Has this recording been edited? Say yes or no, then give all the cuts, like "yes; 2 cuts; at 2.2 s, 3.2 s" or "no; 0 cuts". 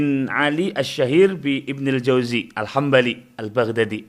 no; 0 cuts